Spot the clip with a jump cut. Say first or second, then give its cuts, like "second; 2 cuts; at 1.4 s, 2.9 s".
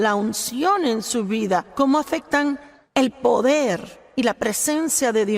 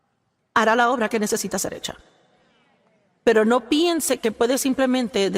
first; 1 cut; at 2.7 s